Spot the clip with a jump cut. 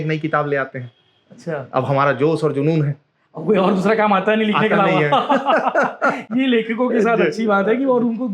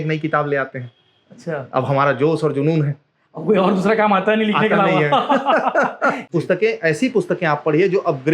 second; 1 cut; at 6.2 s

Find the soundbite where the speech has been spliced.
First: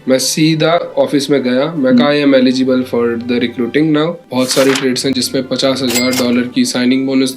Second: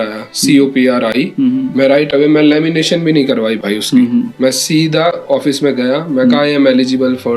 first; 1 cut; at 4.2 s

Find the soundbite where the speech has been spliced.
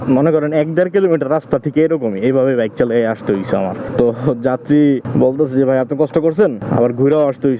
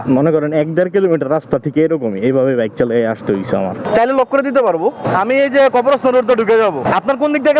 second; 3 cuts; at 3.9 s, 5.1 s, 6.8 s

